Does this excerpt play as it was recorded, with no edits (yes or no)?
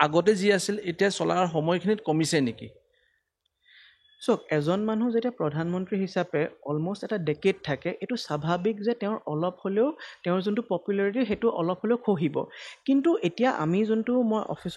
yes